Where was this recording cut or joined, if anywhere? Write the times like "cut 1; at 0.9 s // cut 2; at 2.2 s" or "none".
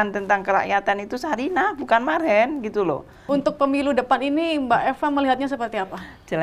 cut 1; at 3.1 s